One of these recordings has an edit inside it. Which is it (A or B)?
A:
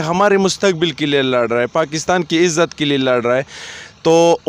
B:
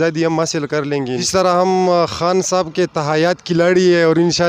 B